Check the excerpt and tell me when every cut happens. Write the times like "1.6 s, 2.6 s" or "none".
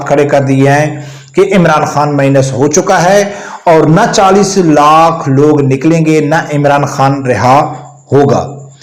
none